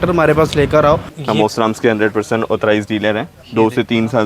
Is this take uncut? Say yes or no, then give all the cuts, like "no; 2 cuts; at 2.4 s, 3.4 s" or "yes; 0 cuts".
no; 2 cuts; at 1.1 s, 3.4 s